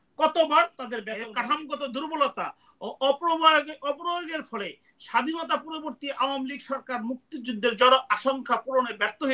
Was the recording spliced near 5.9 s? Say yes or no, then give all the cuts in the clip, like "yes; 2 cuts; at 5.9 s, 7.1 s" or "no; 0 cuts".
no; 1 cut; at 1.2 s